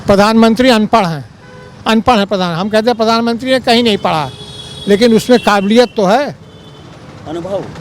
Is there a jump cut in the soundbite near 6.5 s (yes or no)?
no